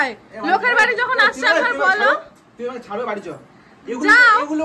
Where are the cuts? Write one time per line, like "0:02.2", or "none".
none